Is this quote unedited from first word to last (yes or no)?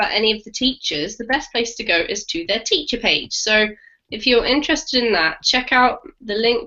yes